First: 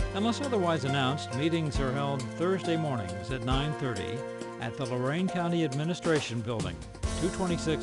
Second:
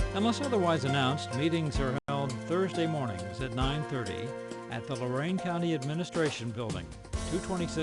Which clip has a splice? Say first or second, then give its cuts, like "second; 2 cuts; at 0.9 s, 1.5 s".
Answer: first; 1 cut; at 2.0 s